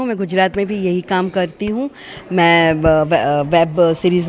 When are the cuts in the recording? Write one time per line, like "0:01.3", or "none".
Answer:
none

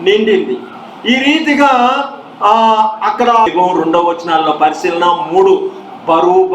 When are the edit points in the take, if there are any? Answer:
0:03.5

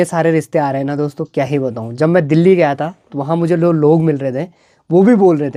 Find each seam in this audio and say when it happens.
none

